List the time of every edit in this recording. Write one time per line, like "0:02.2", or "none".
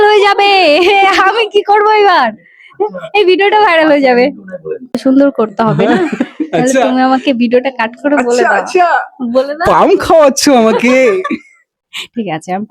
0:04.9

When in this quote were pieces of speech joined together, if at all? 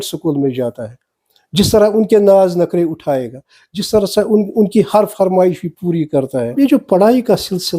0:06.5

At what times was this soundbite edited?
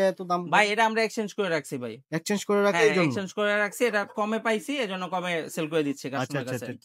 none

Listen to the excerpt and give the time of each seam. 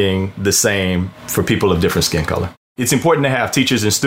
0:01.2
0:02.8

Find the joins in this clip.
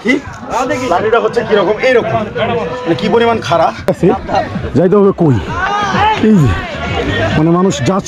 0:03.9

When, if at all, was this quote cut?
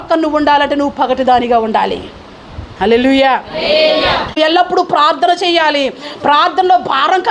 0:04.4

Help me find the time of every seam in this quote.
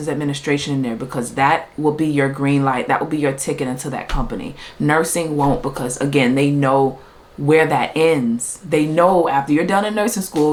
none

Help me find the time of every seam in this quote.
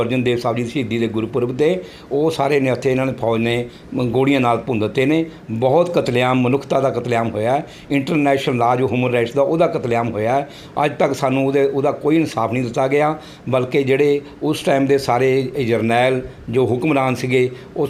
none

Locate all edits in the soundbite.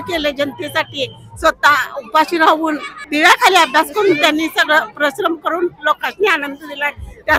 0:03.0

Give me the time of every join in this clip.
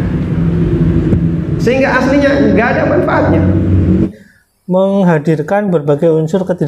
0:04.1

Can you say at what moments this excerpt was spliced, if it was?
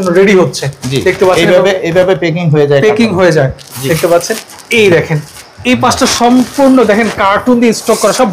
none

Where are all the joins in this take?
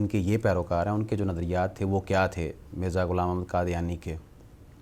none

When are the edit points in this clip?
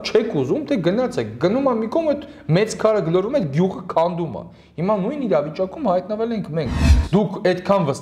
0:06.8

